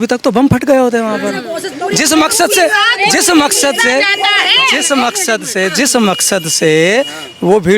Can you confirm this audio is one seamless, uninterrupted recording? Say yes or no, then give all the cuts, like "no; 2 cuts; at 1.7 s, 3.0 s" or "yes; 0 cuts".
yes; 0 cuts